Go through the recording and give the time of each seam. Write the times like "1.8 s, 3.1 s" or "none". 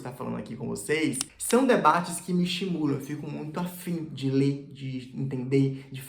1.2 s